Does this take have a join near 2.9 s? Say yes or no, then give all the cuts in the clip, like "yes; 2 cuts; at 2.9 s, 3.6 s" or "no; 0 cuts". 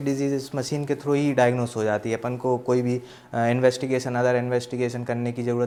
no; 0 cuts